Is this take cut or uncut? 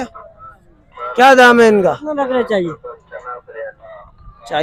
uncut